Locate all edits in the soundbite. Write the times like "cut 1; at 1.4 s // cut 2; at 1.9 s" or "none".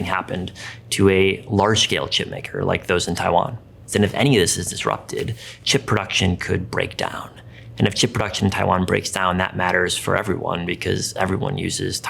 cut 1; at 3.8 s